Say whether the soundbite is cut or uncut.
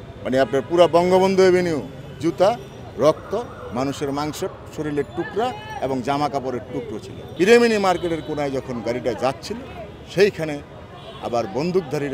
cut